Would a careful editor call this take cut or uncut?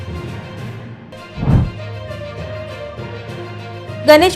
cut